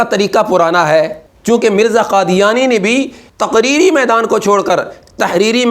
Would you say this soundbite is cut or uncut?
cut